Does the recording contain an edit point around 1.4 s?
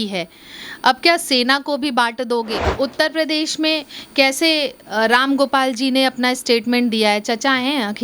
no; 1 cut; at 2.6 s

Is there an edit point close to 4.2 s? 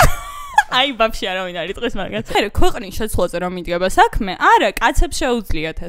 no; 1 cut; at 2.4 s

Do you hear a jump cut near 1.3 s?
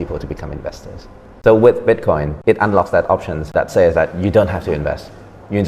yes; 3 cuts; at 1.3 s, 2.3 s, 3.5 s

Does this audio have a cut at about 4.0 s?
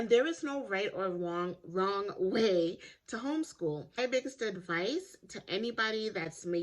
yes; 1 cut; at 4.0 s

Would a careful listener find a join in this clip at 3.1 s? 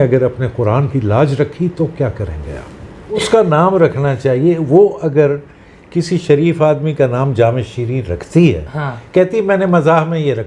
yes; 1 cut; at 3.1 s

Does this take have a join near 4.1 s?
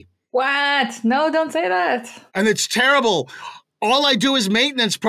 no; 0 cuts

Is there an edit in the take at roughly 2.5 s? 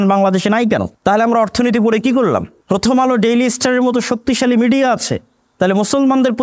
yes; 2 cuts; at 0.9 s, 2.5 s

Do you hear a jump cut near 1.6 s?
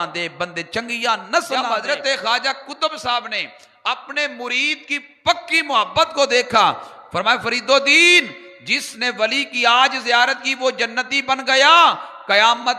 yes; 1 cut; at 1.6 s

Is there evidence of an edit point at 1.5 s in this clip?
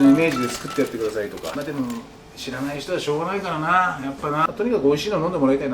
yes; 2 cuts; at 1.5 s, 4.5 s

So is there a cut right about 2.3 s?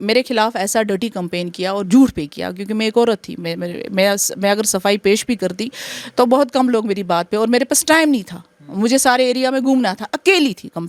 no; 0 cuts

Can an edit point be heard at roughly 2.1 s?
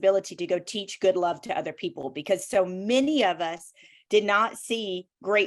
no; 0 cuts

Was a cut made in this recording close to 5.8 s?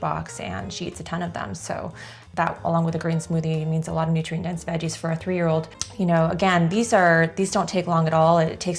yes; 2 cuts; at 2.2 s, 5.8 s

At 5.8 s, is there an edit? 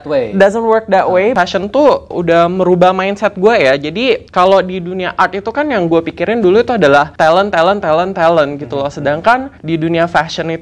no; 4 cuts; at 1.3 s, 4.3 s, 7.1 s, 9.5 s

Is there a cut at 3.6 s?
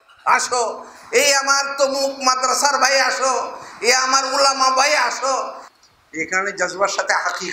no; 1 cut; at 5.6 s

